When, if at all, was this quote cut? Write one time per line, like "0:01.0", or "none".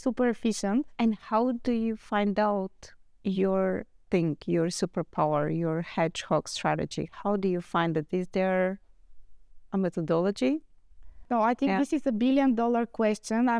0:00.9
0:11.3